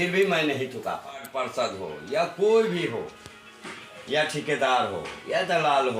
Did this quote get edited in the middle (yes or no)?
yes